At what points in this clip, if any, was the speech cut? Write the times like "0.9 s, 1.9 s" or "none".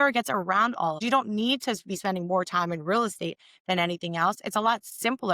1.0 s